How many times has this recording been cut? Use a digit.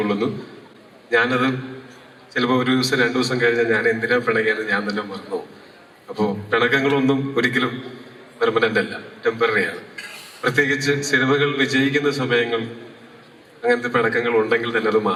0